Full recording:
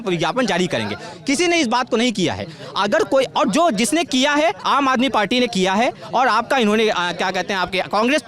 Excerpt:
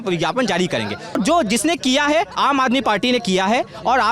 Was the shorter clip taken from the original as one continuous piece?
no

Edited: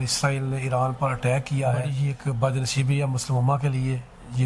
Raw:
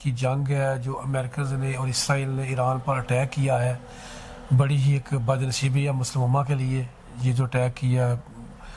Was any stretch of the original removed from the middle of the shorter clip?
yes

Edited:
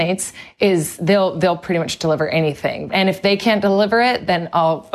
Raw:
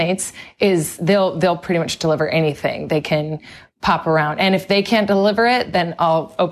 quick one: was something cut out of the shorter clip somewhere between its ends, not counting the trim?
yes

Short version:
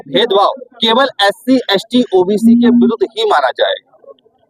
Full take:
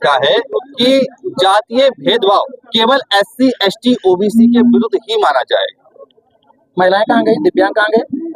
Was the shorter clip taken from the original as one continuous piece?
yes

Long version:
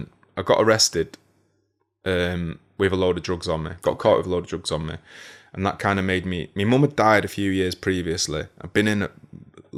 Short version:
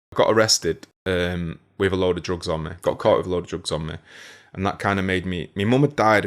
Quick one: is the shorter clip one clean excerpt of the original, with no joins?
no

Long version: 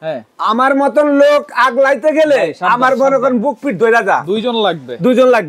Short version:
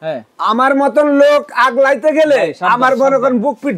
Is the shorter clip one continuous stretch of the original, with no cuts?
yes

